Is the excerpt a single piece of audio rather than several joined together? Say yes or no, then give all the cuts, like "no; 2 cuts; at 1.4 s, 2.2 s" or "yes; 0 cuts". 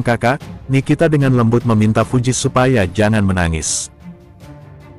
yes; 0 cuts